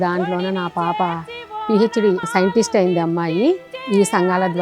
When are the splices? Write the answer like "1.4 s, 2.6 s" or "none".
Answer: 1.5 s, 2.3 s, 3.7 s